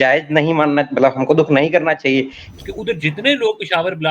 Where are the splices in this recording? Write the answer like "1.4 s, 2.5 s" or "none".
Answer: 2.4 s

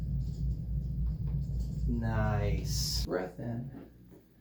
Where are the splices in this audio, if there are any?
3.0 s

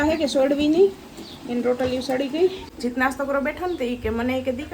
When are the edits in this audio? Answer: 2.6 s

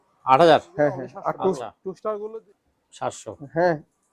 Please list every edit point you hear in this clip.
2.3 s

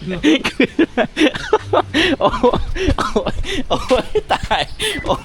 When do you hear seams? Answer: none

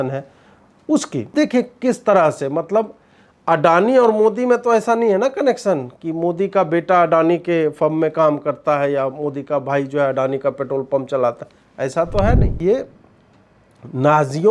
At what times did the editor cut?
1.3 s, 12.5 s

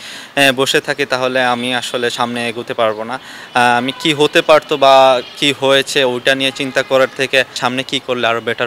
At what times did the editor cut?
7.5 s

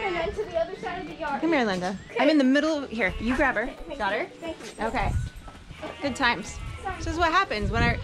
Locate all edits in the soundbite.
2.1 s

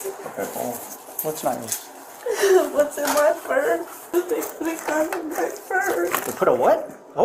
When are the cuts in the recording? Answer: 4.1 s

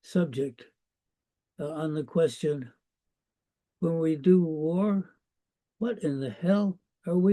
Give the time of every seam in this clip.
5.2 s

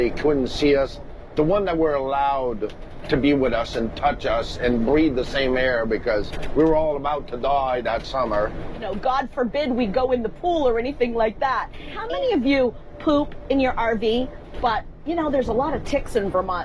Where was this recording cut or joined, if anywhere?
1.2 s, 8.8 s, 12.0 s, 14.4 s

